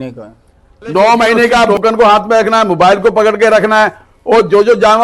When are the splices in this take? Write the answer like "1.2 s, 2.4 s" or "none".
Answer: 1.7 s